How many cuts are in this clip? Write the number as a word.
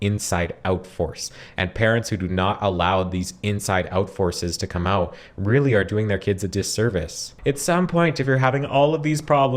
one